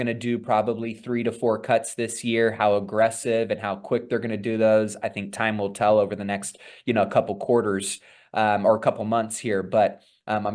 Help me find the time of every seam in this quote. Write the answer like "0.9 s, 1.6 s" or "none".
none